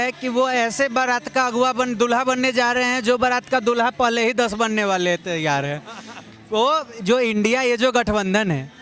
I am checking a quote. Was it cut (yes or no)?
no